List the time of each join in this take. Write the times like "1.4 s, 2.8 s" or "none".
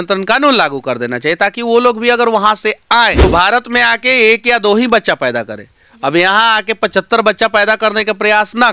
3.2 s